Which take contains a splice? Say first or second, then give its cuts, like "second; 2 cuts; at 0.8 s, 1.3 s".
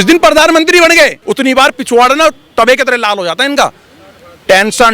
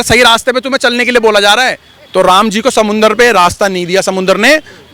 first; 1 cut; at 1.2 s